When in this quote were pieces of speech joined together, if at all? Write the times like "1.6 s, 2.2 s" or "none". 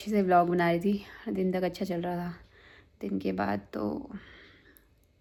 none